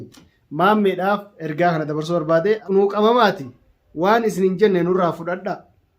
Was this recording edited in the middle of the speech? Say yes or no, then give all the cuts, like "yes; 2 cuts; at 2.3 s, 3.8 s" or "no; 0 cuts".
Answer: yes; 1 cut; at 2.6 s